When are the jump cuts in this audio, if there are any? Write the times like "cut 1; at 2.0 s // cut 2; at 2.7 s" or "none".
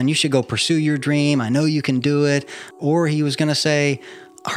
cut 1; at 2.8 s